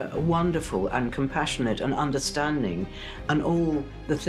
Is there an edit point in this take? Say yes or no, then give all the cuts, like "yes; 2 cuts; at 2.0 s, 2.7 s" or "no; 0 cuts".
no; 0 cuts